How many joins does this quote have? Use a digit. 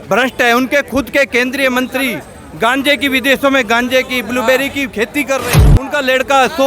1